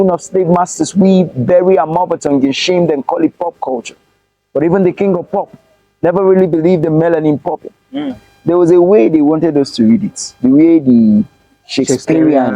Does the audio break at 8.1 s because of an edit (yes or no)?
yes